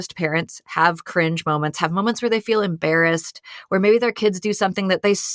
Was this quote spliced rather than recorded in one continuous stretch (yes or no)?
no